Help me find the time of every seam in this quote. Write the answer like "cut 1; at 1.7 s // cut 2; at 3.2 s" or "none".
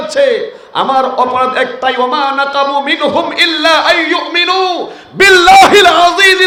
none